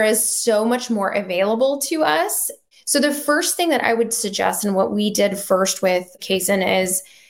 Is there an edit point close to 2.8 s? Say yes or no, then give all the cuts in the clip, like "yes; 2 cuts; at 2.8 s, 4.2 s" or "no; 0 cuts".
no; 1 cut; at 6.2 s